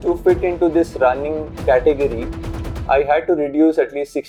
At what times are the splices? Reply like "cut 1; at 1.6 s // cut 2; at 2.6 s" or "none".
none

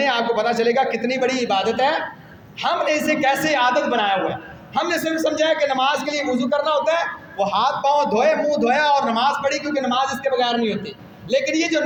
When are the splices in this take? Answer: none

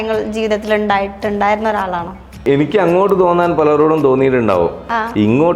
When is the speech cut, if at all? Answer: cut 1; at 2.4 s

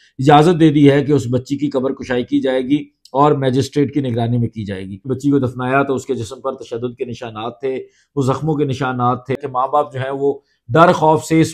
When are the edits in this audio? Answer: cut 1; at 5.1 s // cut 2; at 9.4 s

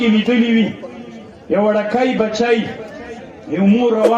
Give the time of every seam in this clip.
none

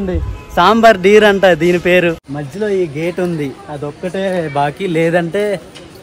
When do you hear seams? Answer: cut 1; at 2.3 s

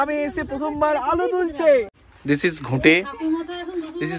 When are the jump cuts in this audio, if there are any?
cut 1; at 2.0 s

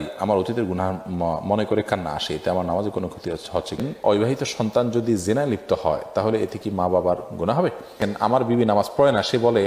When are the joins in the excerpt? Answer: cut 1; at 4.1 s // cut 2; at 8.1 s

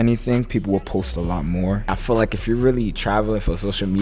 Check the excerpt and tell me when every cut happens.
cut 1; at 1.9 s

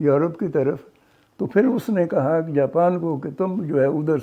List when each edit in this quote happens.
none

